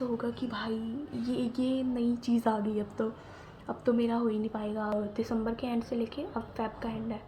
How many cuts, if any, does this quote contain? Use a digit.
1